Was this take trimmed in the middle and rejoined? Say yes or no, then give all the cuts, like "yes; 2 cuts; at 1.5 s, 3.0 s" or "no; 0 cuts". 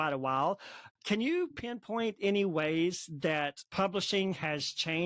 yes; 1 cut; at 3.6 s